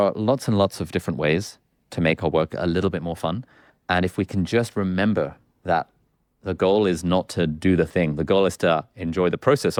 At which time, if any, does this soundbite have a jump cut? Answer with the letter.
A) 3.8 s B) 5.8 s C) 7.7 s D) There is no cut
D